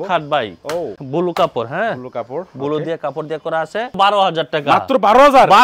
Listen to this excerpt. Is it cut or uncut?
cut